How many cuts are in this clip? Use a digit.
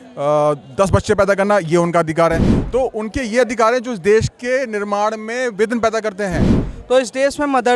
1